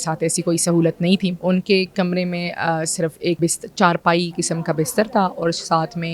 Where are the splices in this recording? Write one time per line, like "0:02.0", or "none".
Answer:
0:01.4
0:03.4

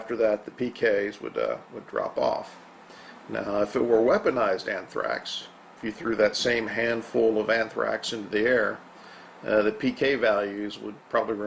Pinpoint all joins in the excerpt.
0:01.2

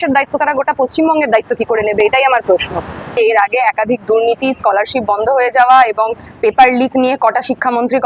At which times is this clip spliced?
none

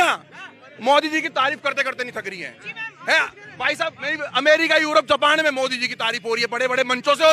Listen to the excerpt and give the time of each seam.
none

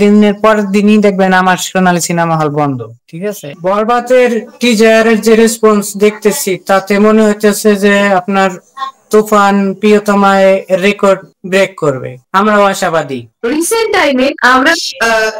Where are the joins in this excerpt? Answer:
0:03.5
0:13.2

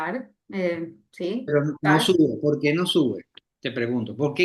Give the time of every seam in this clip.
none

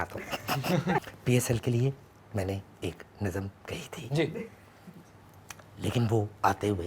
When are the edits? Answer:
0:01.1

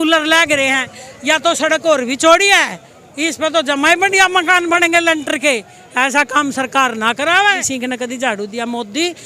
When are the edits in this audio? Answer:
0:07.6

